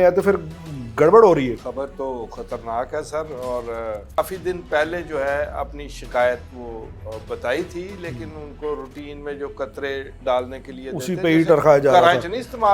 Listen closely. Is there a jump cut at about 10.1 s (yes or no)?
no